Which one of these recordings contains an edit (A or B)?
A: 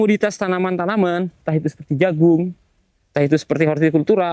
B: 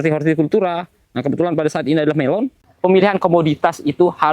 B